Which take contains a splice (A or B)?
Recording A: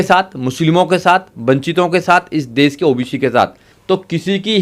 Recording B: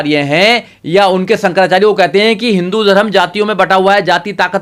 A